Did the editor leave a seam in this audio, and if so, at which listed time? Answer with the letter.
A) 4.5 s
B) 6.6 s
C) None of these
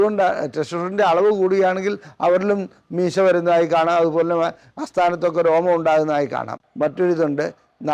B